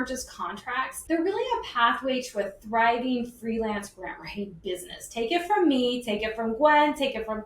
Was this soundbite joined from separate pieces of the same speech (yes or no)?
yes